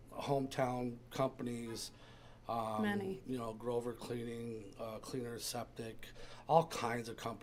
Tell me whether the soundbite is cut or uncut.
uncut